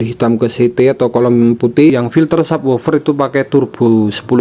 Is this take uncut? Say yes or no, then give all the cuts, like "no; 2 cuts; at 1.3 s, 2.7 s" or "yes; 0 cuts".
no; 1 cut; at 1.9 s